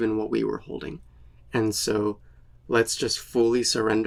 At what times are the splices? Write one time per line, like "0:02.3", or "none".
none